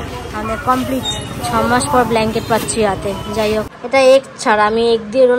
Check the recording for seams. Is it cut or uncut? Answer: cut